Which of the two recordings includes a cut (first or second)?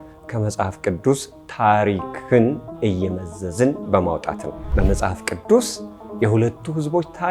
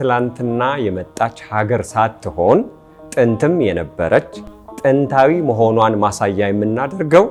first